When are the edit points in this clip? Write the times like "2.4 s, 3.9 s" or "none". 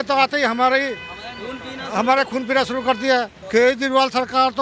3.4 s